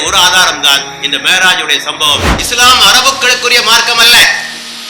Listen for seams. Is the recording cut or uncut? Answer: cut